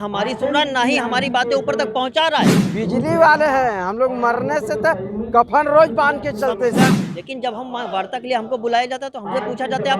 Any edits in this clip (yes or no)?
yes